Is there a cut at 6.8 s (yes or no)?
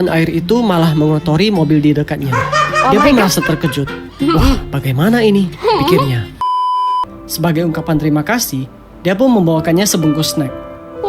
yes